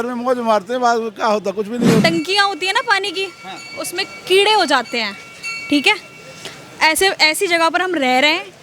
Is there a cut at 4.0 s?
no; 1 cut; at 2.0 s

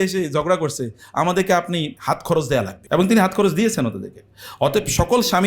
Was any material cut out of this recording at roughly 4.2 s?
no; 2 cuts; at 2.0 s, 2.8 s

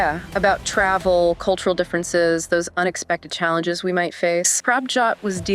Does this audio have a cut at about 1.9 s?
no; 1 cut; at 4.5 s

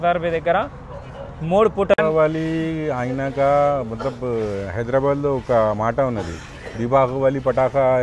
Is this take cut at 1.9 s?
yes; 1 cut; at 1.9 s

